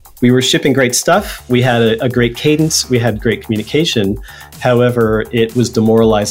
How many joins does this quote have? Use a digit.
0